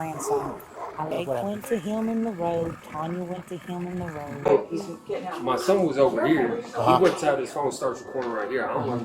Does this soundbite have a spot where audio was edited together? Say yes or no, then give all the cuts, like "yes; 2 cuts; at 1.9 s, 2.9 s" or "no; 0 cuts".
yes; 2 cuts; at 1.1 s, 4.5 s